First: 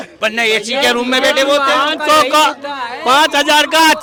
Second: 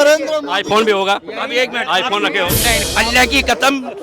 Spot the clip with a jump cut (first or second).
second